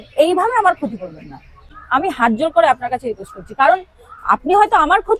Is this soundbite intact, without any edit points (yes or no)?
yes